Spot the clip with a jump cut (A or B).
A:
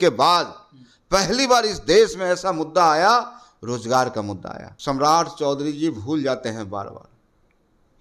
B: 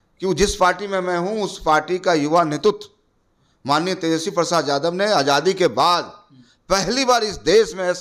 A